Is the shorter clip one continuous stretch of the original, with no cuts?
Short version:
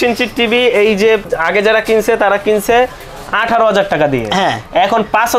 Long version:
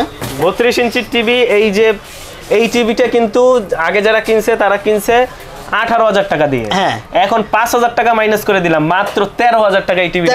no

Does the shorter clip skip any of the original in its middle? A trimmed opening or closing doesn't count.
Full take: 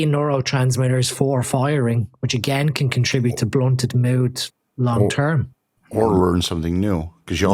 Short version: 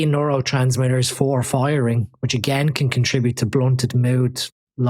no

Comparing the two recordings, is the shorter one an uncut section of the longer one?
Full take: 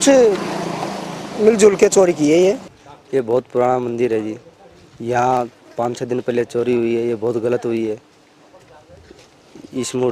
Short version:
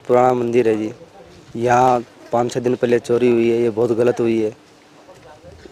yes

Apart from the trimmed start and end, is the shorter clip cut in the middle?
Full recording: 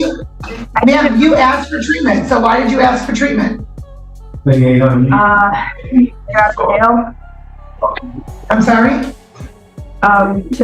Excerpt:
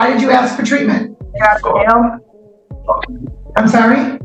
yes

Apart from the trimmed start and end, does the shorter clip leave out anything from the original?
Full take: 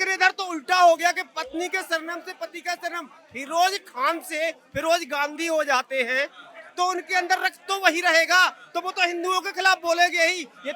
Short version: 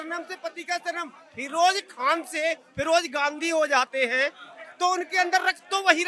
no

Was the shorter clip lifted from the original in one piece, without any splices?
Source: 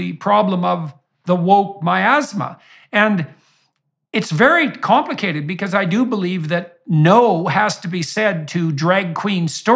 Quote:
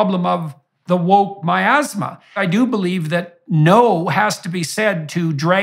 no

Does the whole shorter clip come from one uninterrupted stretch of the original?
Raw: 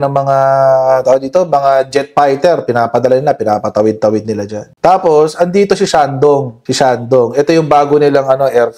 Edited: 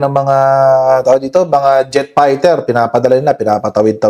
yes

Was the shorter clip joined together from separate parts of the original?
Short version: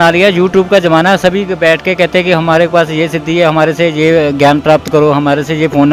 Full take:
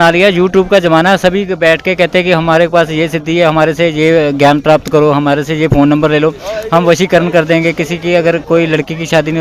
no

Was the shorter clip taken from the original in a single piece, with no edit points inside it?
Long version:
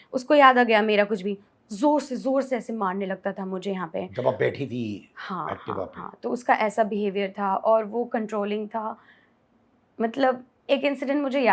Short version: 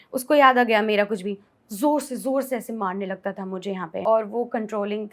no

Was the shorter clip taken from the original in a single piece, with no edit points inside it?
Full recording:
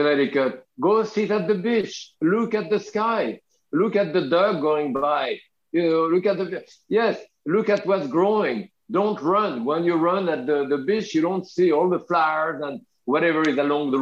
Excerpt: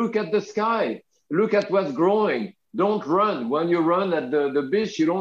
no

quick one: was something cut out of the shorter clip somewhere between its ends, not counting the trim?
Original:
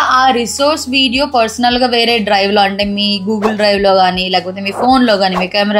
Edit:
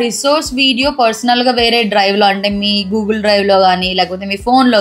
no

